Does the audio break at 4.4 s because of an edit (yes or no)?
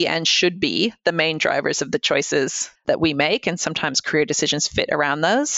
no